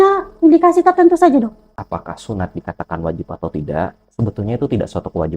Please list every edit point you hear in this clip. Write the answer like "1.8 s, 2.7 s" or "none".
1.8 s